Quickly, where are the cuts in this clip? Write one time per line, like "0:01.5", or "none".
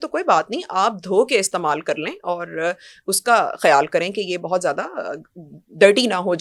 none